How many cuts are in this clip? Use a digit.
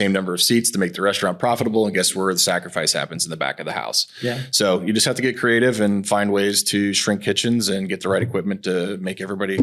0